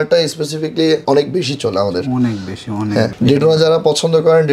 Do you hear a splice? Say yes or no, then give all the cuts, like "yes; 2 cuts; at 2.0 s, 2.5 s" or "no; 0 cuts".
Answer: no; 0 cuts